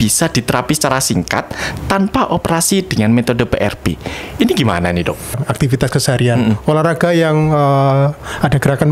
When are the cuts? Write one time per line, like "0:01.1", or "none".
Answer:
0:05.4